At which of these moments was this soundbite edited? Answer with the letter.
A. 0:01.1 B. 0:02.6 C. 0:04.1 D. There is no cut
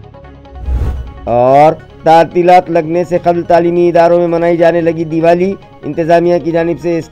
D